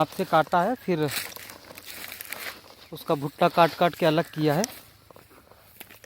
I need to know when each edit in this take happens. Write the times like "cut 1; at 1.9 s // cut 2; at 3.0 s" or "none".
none